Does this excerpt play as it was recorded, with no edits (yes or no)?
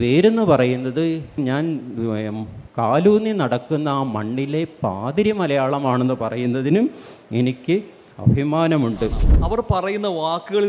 no